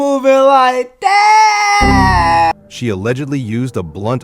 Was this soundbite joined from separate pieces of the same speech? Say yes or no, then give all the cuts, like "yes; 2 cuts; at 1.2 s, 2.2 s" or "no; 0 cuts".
yes; 1 cut; at 2.5 s